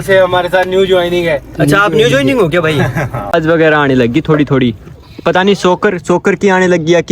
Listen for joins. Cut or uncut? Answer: cut